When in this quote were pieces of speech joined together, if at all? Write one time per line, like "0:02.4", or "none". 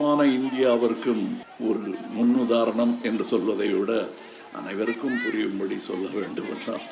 0:01.5